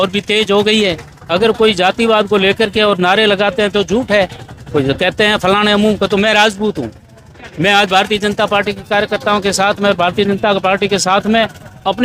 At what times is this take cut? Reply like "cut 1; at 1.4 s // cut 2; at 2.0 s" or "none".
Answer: none